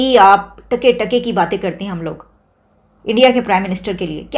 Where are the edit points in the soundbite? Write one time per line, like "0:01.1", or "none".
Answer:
none